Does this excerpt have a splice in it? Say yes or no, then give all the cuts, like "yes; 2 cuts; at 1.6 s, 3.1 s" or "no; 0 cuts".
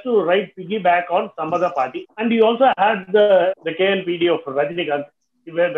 yes; 2 cuts; at 2.0 s, 3.6 s